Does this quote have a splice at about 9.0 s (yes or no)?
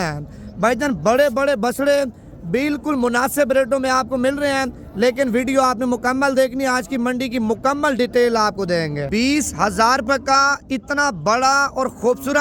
yes